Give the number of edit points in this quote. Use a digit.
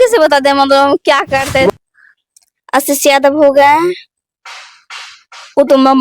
1